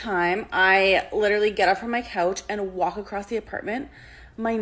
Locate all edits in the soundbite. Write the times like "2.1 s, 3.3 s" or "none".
none